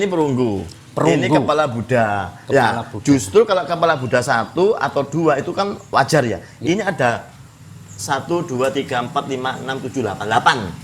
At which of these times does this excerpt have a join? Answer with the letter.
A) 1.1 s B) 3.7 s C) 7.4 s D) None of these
D